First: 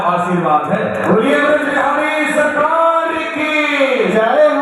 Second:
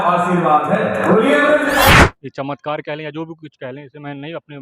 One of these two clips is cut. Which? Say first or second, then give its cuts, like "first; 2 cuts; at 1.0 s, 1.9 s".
second; 1 cut; at 1.9 s